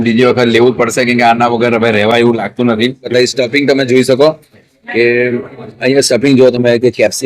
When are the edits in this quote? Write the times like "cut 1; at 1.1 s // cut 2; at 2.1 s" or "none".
cut 1; at 3.1 s